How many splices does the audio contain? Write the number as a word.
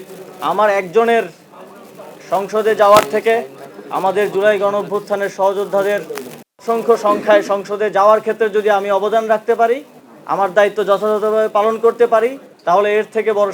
one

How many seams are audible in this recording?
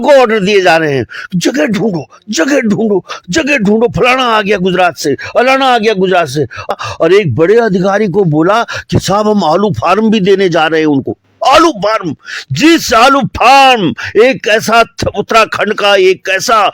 one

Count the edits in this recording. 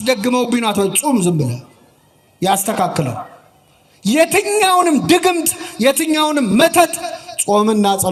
zero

